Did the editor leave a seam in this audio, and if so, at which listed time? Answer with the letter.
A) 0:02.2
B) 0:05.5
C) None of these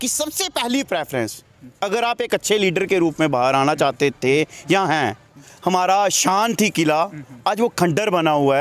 B